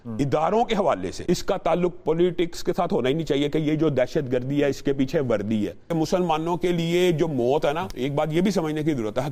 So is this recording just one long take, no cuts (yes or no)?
no